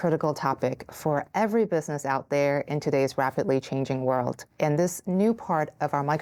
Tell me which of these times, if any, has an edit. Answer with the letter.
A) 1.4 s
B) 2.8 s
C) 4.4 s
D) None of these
C